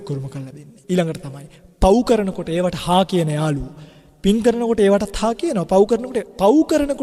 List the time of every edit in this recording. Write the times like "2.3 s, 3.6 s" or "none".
none